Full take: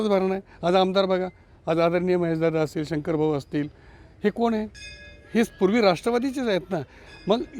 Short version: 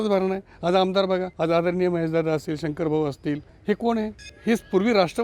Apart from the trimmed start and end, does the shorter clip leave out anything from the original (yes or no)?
yes